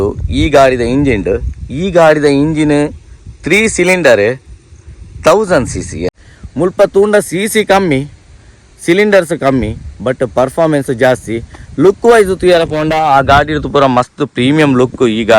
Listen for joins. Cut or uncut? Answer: cut